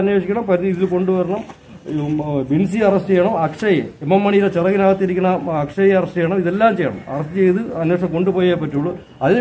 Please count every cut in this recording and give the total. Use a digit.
0